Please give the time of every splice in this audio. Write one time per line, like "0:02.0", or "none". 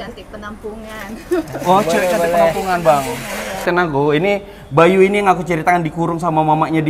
0:03.7